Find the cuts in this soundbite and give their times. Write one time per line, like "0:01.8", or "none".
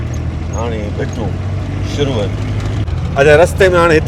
0:02.9